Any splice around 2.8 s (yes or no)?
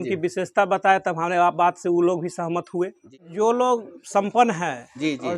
yes